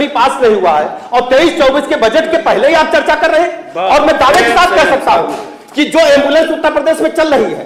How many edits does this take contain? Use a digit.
0